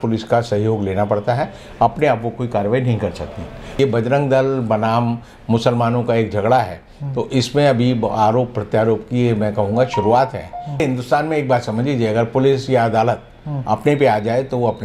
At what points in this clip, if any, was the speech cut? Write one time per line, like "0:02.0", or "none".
0:03.8
0:10.8